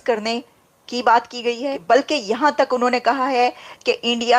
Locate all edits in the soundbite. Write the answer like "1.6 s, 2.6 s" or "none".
1.8 s

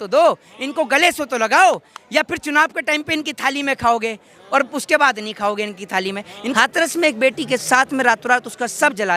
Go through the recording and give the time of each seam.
6.5 s

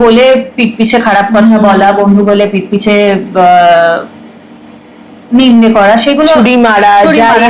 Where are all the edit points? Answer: none

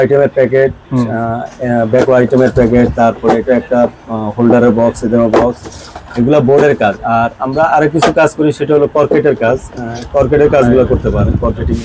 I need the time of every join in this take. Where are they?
none

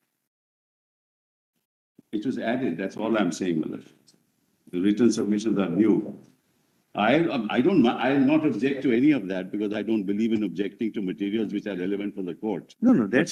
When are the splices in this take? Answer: none

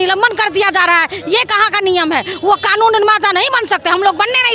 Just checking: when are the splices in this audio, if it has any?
none

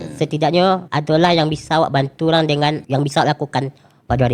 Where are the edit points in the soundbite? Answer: 0.9 s, 2.8 s

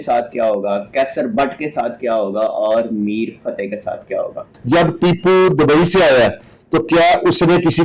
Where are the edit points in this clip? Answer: 4.5 s

